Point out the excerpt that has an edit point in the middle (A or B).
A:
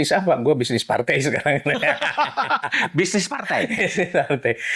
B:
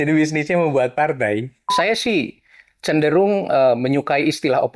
B